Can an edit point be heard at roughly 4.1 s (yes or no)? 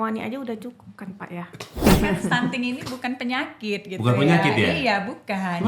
no